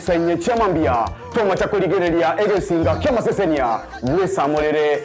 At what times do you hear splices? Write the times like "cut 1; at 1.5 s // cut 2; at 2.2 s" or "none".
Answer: none